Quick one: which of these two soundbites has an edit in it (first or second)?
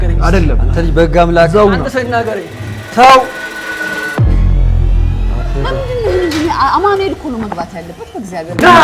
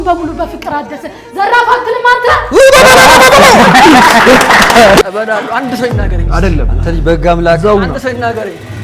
second